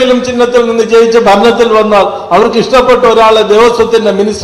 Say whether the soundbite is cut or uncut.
uncut